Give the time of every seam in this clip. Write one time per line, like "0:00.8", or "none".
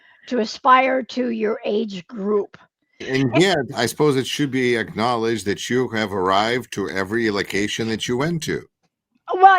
0:03.0